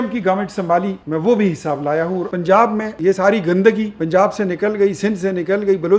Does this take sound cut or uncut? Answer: cut